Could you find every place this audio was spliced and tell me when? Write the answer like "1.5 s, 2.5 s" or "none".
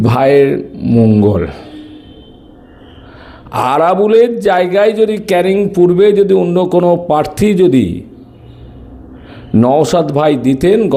none